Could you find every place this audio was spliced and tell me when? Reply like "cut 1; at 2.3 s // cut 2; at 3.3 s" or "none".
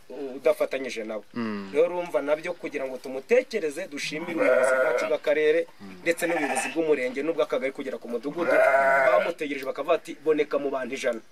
none